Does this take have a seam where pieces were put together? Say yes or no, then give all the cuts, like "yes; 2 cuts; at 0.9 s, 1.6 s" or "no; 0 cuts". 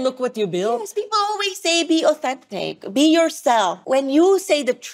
yes; 1 cut; at 3.8 s